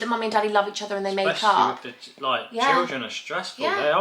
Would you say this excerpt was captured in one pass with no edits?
yes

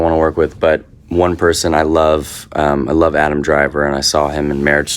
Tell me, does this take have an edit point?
no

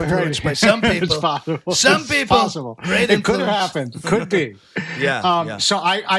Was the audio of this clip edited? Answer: no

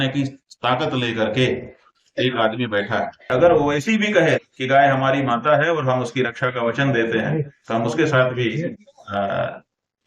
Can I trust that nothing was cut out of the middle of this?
no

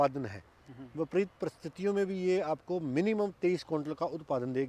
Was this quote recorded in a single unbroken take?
yes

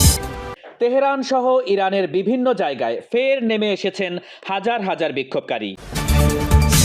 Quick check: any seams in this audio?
yes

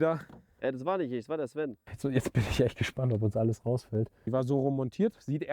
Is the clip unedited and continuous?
no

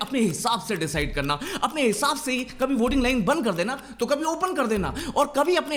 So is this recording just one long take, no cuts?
yes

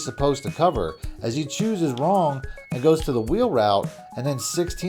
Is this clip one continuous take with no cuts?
yes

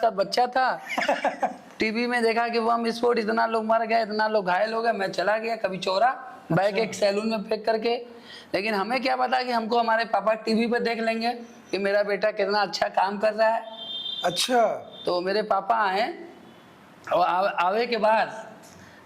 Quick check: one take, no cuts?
yes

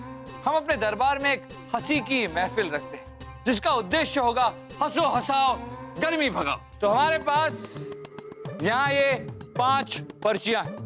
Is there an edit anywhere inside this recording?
yes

